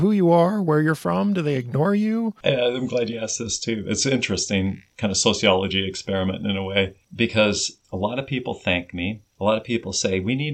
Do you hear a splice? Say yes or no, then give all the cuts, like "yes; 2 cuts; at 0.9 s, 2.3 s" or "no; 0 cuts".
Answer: yes; 5 cuts; at 2.4 s, 4.9 s, 7.0 s, 7.7 s, 9.2 s